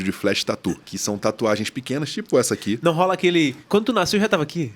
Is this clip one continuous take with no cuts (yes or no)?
no